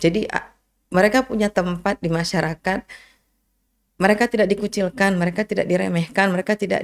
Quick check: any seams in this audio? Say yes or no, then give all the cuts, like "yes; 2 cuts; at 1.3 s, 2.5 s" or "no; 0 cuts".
no; 0 cuts